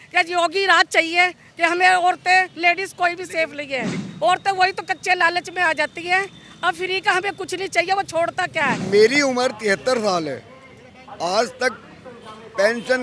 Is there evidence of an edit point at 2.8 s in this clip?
no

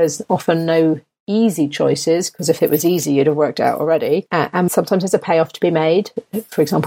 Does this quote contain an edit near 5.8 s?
no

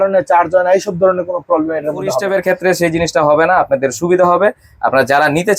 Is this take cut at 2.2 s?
yes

